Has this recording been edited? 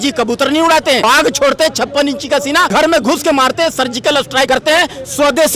yes; 3 cuts; at 1.0 s, 2.7 s, 4.5 s

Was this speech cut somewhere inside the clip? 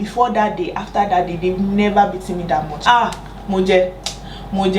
yes; 1 cut; at 2.7 s

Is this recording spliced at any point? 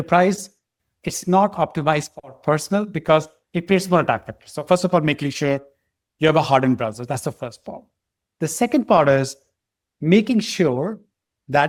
no; 0 cuts

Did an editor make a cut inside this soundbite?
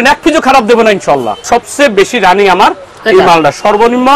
yes; 1 cut; at 1.4 s

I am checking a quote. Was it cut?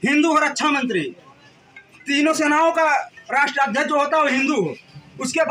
no; 0 cuts

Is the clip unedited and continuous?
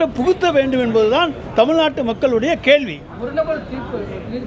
yes; 0 cuts

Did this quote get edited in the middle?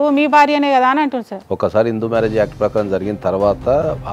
yes; 1 cut; at 1.3 s

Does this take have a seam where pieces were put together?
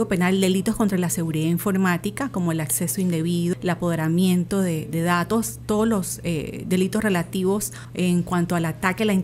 yes; 2 cuts; at 3.5 s, 7.8 s

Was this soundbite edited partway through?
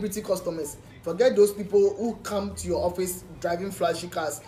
no; 0 cuts

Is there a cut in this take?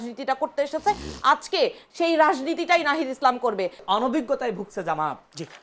yes; 1 cut; at 3.8 s

